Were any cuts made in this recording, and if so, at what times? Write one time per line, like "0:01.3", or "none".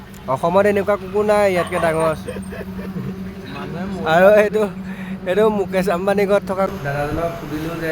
0:06.7